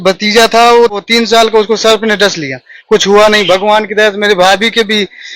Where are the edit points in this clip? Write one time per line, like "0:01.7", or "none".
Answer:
0:01.0